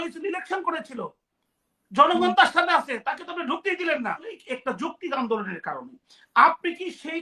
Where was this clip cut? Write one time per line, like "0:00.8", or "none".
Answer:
0:04.3